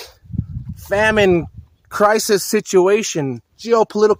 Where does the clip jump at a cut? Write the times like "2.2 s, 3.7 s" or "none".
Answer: none